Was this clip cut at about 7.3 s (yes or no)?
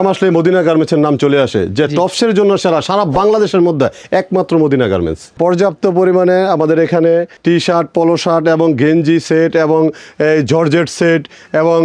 yes